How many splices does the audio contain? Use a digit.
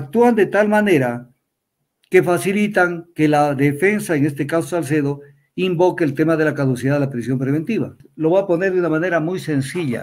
1